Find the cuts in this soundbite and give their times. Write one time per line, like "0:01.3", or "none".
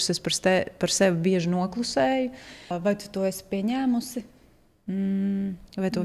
0:02.7